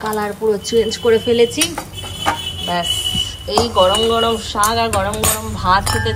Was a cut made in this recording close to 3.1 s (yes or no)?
no